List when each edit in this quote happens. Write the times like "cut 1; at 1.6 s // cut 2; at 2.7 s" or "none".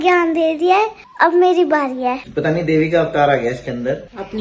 cut 1; at 2.2 s